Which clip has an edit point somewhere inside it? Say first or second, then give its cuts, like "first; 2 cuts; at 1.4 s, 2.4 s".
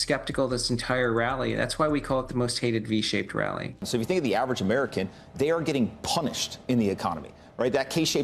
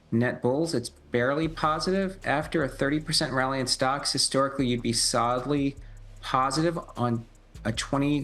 first; 1 cut; at 3.8 s